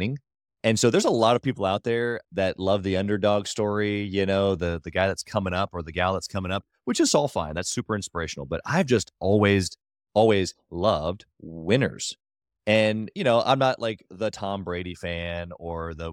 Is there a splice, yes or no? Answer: no